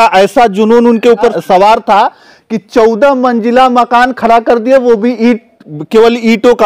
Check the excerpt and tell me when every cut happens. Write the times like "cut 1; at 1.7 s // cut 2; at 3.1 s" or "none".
cut 1; at 1.4 s